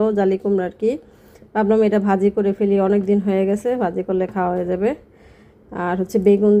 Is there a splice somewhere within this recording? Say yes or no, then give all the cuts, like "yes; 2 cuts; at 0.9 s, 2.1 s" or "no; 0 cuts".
no; 0 cuts